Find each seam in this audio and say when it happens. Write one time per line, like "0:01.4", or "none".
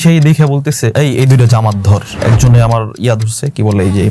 0:00.9
0:02.1